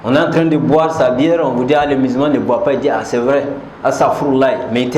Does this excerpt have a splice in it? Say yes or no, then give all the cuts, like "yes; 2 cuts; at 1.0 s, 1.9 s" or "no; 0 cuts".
no; 0 cuts